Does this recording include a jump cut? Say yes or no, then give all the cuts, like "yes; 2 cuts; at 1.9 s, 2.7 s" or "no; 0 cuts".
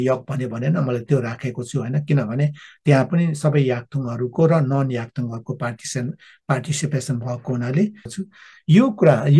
yes; 1 cut; at 8.1 s